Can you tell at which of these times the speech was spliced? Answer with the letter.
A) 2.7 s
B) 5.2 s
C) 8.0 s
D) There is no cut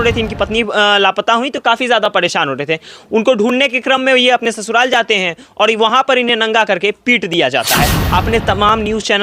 C